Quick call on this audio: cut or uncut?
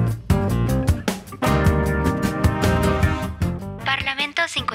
cut